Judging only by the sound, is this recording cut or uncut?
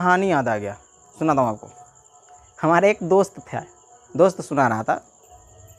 uncut